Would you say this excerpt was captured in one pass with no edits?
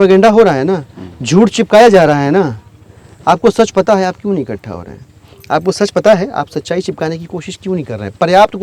yes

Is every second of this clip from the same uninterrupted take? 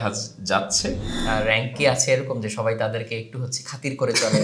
no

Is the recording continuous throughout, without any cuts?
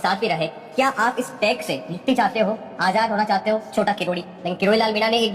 no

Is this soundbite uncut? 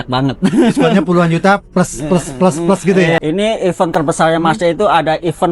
no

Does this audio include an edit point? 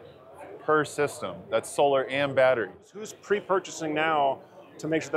yes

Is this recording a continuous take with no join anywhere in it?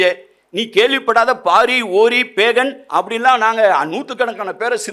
no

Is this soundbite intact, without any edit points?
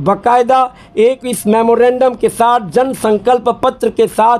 yes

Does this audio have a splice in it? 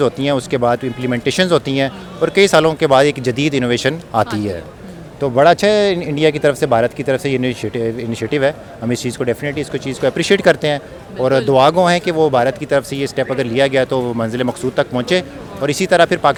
no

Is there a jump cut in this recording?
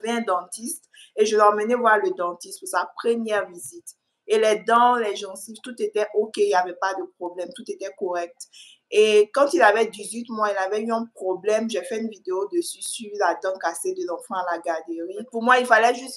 yes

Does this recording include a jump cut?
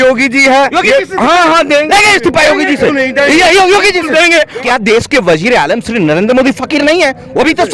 yes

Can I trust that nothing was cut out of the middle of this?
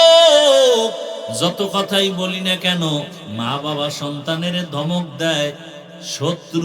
no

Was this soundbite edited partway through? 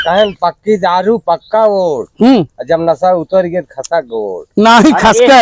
no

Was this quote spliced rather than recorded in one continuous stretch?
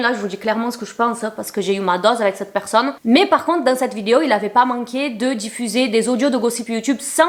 no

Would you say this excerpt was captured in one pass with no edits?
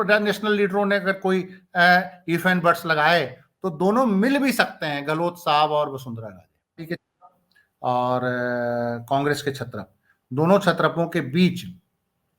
no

